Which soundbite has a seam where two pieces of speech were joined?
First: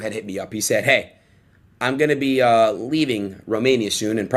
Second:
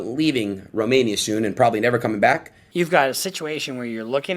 second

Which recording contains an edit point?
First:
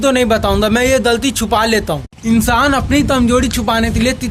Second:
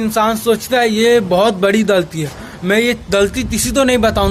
first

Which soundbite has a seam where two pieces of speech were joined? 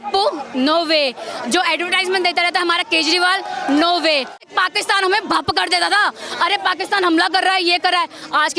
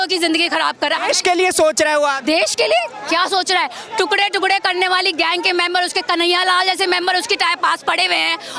first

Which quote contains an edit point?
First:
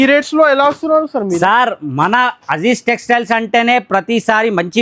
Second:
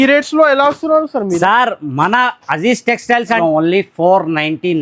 second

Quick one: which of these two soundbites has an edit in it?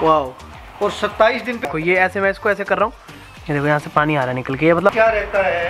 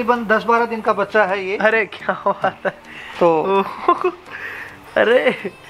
first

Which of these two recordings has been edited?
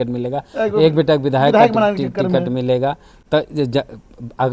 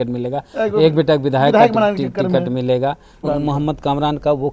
second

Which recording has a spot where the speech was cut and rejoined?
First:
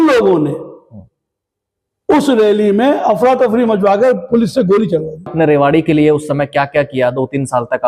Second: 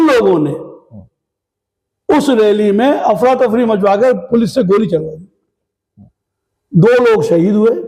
first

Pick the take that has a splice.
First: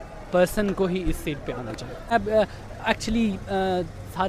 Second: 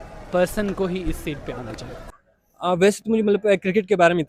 first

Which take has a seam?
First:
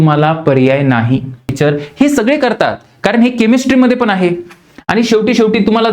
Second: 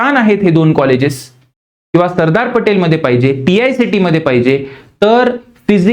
first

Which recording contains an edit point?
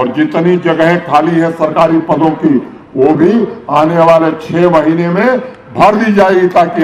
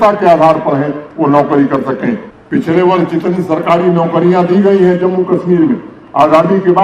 second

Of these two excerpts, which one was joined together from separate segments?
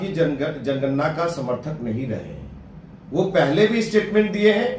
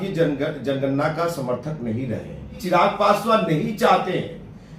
second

